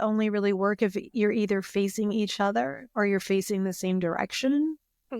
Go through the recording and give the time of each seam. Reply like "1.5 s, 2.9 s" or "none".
none